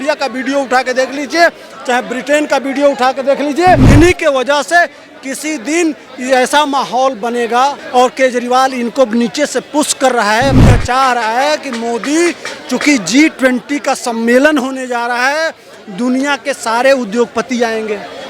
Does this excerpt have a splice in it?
yes; 3 cuts; at 3.9 s, 7.8 s, 10.6 s

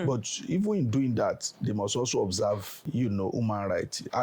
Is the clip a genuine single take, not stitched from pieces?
no; 1 cut; at 2.8 s

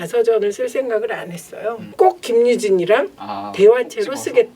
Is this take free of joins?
no; 1 cut; at 1.8 s

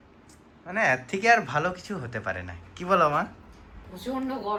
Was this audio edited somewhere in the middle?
no; 0 cuts

